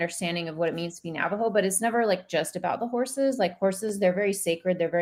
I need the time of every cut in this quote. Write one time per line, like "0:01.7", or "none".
none